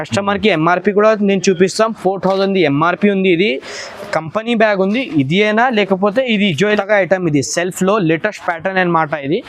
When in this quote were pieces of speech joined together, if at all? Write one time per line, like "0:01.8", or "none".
0:06.8